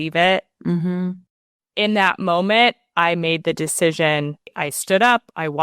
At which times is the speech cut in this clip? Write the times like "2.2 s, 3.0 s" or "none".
1.2 s, 4.5 s